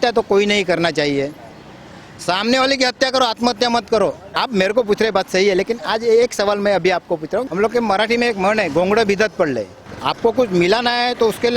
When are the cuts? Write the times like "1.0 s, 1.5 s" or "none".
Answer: 4.4 s, 7.5 s, 9.9 s